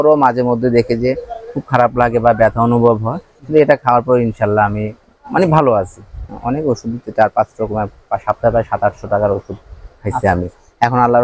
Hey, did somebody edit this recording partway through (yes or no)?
yes